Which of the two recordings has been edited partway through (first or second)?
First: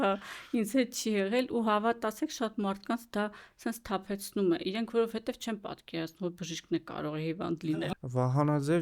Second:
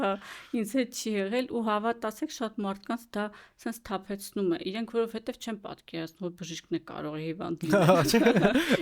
first